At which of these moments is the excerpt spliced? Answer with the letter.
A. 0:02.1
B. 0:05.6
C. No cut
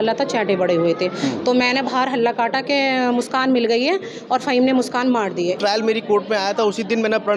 B